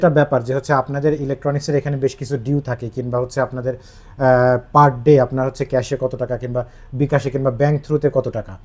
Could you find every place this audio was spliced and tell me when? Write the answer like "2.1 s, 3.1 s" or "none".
none